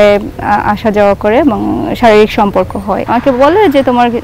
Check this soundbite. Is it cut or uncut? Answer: cut